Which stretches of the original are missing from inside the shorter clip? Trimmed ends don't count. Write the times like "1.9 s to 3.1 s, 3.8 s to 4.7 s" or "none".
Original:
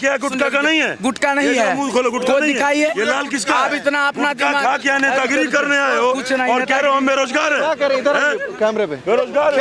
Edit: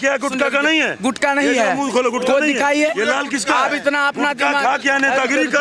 none